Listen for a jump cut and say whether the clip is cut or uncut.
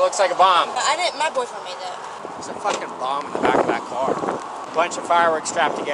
cut